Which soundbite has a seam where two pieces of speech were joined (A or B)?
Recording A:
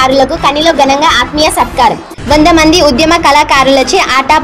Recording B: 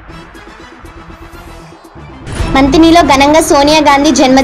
B